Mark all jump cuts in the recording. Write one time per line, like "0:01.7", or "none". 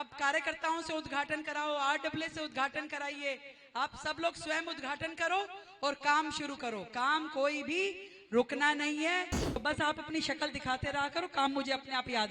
0:09.6